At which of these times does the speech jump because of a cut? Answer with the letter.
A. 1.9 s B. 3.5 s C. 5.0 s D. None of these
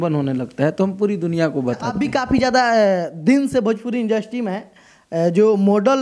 A